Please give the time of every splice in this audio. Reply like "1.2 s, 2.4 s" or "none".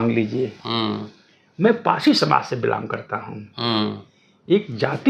none